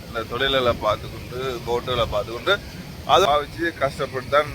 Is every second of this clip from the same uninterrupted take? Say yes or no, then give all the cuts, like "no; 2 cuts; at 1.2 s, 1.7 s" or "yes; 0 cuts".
no; 1 cut; at 3.3 s